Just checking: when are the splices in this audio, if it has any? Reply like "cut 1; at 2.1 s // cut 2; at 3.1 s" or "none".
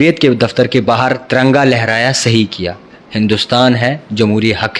none